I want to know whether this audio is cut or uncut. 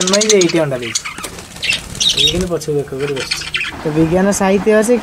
cut